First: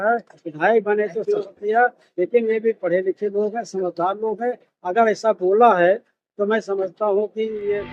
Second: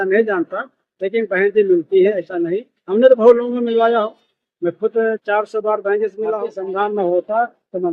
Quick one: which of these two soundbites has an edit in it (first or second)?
second